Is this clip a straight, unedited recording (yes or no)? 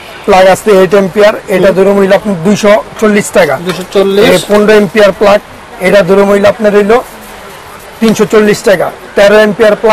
yes